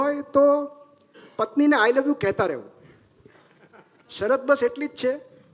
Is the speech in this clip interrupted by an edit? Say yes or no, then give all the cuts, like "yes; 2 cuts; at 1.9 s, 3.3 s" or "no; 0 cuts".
no; 0 cuts